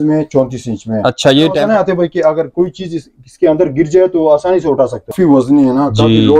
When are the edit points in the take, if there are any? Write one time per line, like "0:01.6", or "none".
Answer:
0:01.6
0:05.1